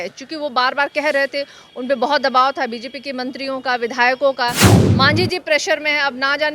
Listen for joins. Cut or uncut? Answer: cut